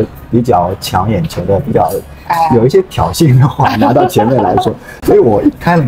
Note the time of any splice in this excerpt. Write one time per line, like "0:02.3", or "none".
none